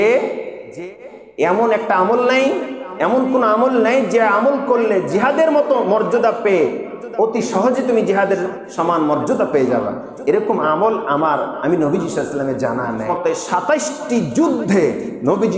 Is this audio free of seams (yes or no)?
no